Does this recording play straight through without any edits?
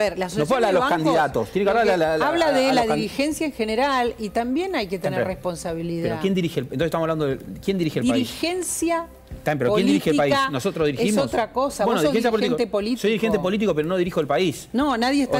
yes; 0 cuts

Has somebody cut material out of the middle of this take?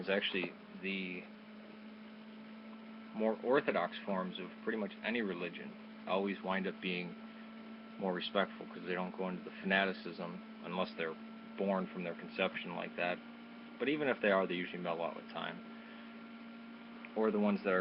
yes; 1 cut; at 9.2 s

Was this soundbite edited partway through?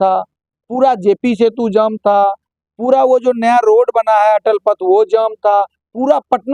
no; 0 cuts

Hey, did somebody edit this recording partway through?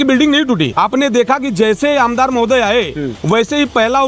no; 0 cuts

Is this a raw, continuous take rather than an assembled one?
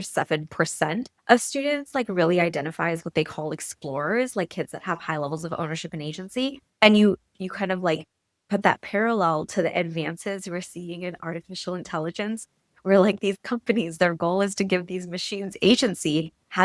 no; 2 cuts; at 1.1 s, 6.6 s

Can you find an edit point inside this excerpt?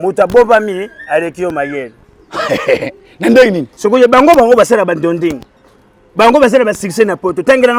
no; 0 cuts

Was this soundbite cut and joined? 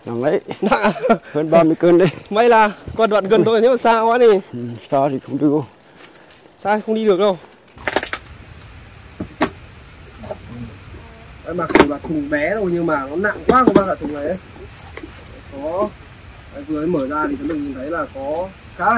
yes; 1 cut; at 7.7 s

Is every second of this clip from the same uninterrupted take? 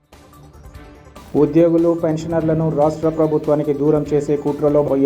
no; 1 cut; at 1.1 s

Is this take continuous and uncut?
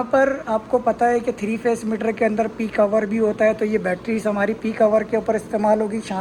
yes; 0 cuts

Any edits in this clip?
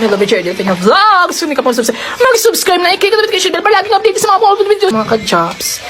yes; 1 cut; at 4.9 s

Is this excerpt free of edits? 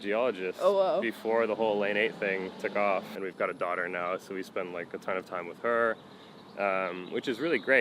no; 1 cut; at 3.1 s

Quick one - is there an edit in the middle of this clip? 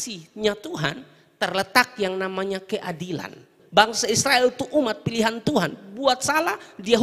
yes; 1 cut; at 3.5 s

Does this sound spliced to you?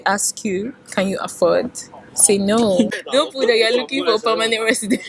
yes; 1 cut; at 2.9 s

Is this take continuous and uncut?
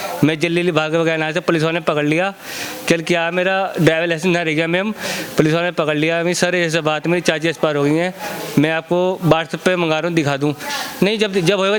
yes; 0 cuts

